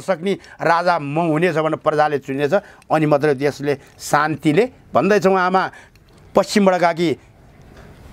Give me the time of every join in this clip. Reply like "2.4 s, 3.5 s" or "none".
none